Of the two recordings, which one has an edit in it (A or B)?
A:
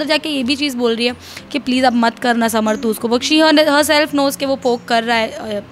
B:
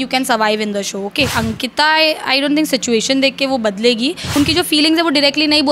B